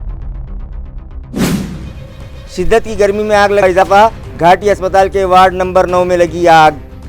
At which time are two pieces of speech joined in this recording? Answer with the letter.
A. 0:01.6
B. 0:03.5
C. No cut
A